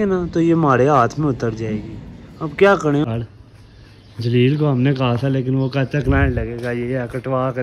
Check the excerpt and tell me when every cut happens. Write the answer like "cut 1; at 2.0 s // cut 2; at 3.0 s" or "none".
cut 1; at 3.0 s